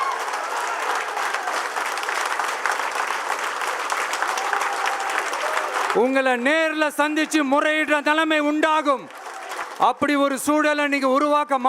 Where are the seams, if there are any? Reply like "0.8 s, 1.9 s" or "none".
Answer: 9.7 s